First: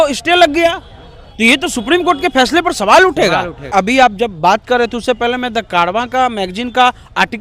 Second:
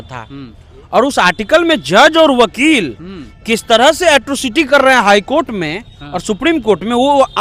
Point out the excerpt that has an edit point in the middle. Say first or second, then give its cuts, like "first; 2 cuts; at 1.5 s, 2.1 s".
first; 1 cut; at 3.7 s